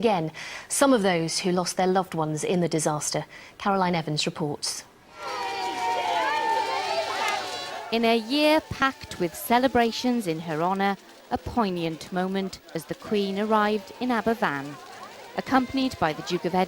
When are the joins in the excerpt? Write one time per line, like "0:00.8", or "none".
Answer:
0:12.7